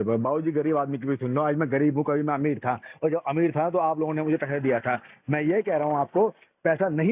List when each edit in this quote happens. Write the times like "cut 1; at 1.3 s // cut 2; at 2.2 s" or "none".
none